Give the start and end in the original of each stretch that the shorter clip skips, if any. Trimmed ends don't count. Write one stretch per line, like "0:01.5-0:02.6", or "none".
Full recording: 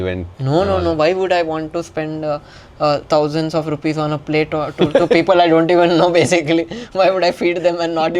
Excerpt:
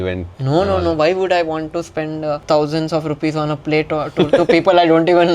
0:02.4-0:03.0